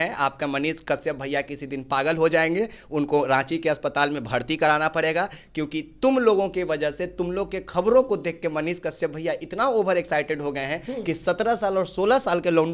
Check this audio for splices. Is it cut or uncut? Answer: uncut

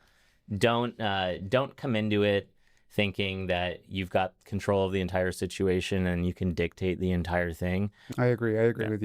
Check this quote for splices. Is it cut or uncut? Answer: cut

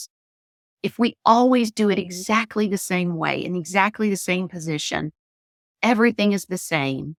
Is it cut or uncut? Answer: uncut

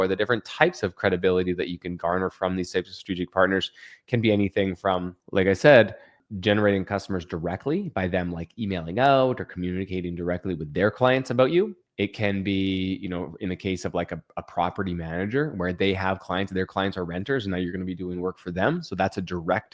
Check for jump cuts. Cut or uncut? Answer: cut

